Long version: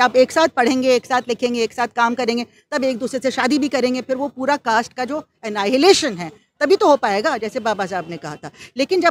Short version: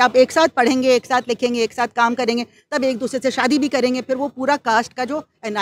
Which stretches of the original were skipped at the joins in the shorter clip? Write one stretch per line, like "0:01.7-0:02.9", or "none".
none